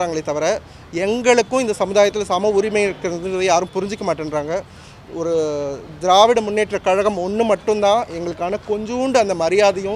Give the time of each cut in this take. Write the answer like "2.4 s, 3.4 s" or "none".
none